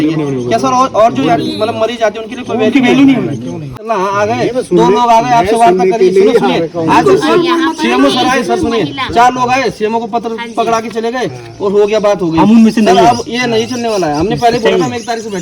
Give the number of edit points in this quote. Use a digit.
1